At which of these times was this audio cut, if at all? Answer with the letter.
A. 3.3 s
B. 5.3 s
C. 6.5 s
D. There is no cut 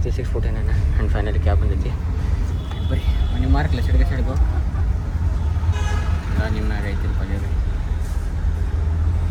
D